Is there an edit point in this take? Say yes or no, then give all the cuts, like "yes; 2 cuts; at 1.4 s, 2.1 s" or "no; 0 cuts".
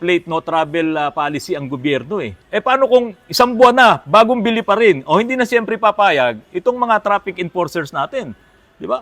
yes; 1 cut; at 2.4 s